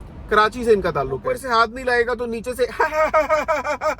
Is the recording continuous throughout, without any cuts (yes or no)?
no